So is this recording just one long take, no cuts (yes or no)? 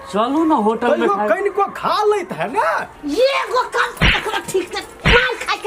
no